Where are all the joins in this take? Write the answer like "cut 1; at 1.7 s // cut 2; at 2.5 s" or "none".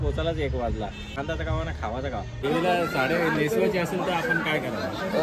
cut 1; at 1.2 s // cut 2; at 2.4 s